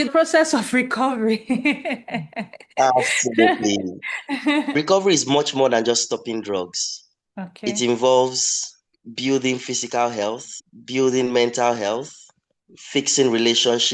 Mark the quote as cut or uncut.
uncut